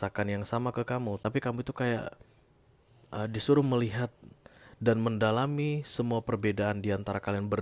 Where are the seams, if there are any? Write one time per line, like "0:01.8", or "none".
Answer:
0:01.2